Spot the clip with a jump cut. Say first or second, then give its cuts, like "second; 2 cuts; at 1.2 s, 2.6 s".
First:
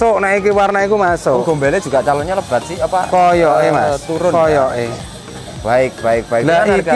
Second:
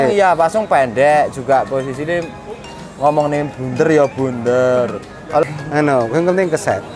second; 1 cut; at 5.4 s